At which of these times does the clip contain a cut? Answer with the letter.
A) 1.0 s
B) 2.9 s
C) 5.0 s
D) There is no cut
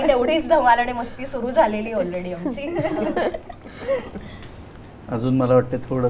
D